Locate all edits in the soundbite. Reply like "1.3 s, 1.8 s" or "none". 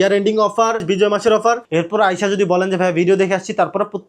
0.8 s, 1.6 s